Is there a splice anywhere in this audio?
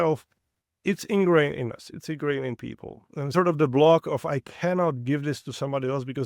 yes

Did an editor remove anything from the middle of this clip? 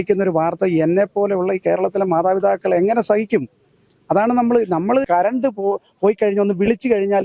yes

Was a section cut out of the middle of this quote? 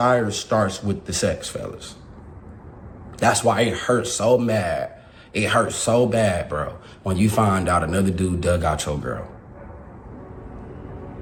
no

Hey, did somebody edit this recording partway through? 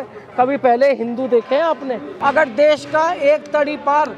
yes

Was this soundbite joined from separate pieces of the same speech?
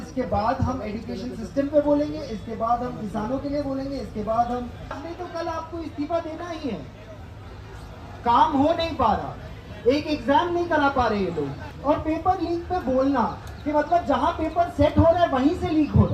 yes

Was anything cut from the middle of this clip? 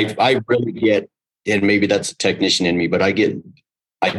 no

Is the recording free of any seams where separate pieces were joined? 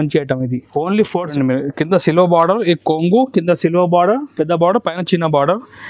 no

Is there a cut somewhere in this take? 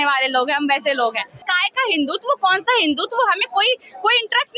yes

